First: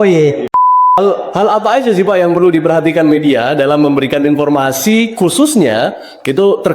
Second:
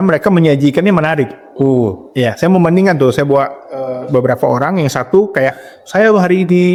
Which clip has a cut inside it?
first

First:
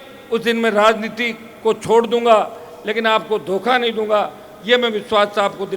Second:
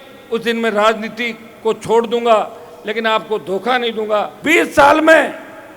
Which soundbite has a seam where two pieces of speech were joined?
second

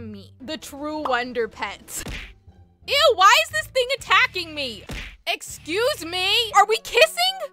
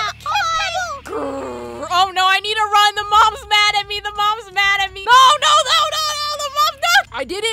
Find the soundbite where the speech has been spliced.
first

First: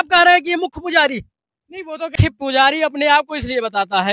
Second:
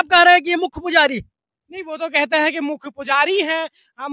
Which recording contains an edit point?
first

